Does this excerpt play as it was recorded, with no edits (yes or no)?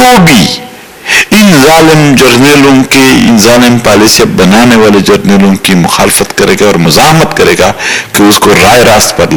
yes